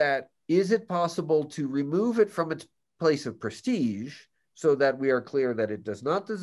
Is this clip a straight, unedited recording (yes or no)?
yes